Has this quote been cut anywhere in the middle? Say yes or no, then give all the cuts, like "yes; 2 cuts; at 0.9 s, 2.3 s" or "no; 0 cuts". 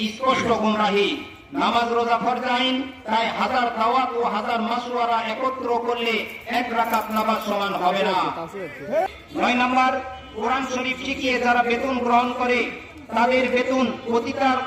yes; 1 cut; at 9.1 s